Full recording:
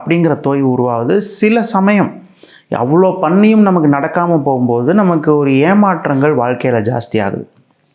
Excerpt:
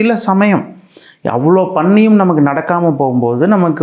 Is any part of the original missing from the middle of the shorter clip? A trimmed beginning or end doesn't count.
no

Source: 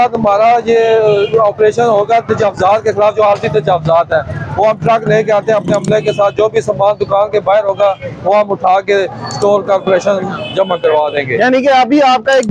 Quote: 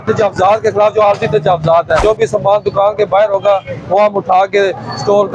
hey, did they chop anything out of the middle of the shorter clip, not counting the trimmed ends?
yes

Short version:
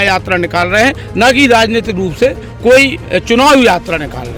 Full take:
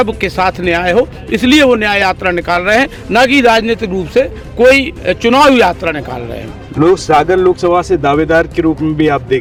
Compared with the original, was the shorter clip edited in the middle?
no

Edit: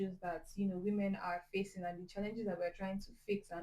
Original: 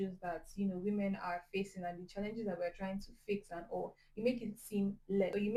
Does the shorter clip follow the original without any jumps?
yes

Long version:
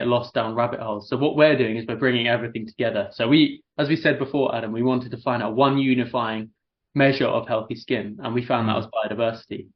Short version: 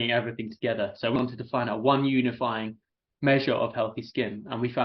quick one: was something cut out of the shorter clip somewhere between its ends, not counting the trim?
yes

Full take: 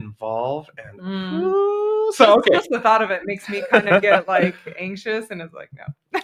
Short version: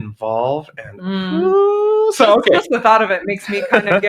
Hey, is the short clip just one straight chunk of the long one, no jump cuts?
yes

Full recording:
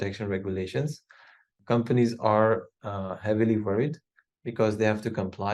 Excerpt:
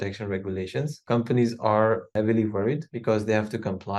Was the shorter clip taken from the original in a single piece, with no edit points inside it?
no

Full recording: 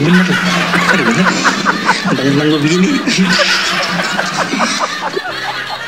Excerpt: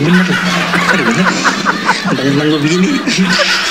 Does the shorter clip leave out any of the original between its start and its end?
no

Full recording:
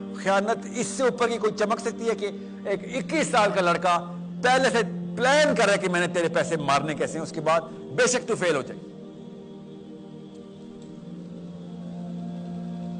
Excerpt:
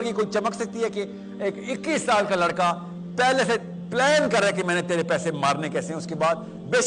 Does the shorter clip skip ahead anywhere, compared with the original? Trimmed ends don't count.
no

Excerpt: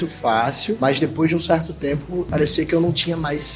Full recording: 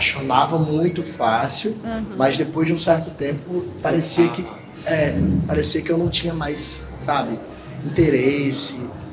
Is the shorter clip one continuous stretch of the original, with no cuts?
no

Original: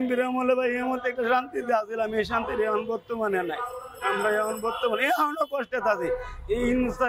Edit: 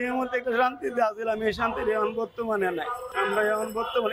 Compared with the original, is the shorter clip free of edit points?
no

